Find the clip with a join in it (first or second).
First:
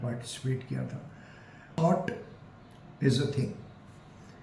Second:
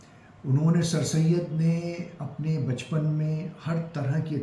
first